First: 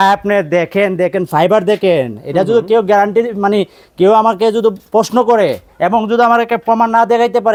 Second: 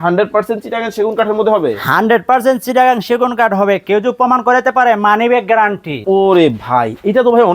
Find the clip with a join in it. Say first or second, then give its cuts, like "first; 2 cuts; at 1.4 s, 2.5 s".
second; 1 cut; at 6.0 s